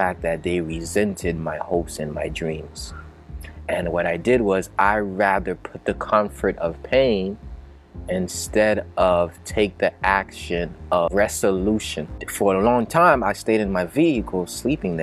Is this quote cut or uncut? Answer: cut